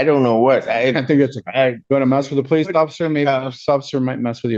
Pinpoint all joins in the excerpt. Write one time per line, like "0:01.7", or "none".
0:01.8